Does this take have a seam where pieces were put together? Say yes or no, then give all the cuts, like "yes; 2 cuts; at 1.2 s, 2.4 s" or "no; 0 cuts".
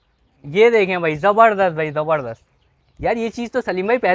no; 0 cuts